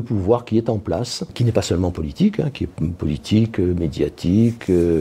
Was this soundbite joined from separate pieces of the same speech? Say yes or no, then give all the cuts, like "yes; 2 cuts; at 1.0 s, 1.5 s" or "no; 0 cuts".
yes; 1 cut; at 1.4 s